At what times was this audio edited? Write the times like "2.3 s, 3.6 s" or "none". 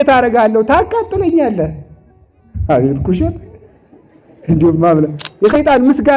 5.2 s

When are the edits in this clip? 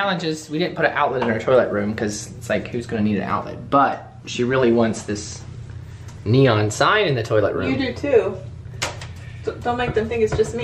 none

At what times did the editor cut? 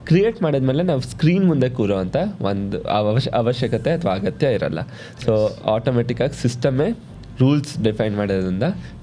none

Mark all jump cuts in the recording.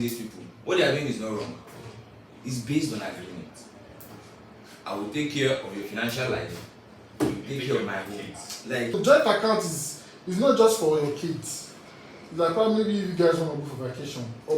9.0 s

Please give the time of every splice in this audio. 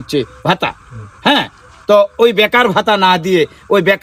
none

